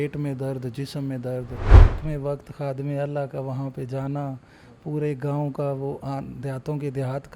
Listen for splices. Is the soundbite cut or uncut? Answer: cut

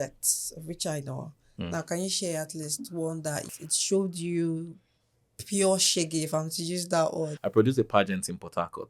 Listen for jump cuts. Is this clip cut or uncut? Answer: cut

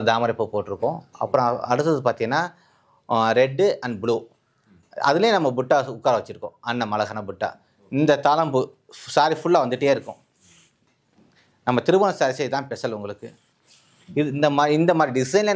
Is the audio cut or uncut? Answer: uncut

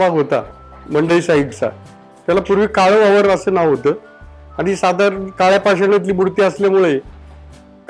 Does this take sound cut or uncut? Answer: uncut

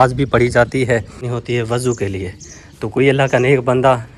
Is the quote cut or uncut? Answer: cut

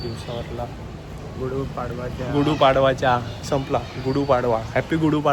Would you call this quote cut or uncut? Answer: uncut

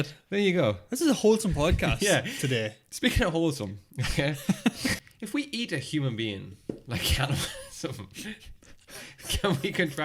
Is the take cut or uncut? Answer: cut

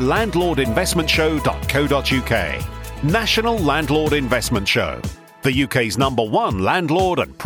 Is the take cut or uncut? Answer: uncut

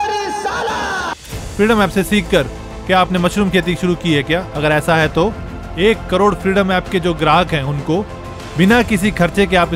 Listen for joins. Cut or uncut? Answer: cut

